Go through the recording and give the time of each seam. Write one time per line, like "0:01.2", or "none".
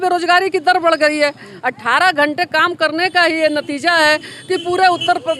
none